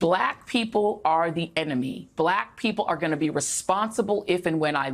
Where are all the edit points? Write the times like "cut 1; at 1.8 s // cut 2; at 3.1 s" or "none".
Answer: cut 1; at 2.2 s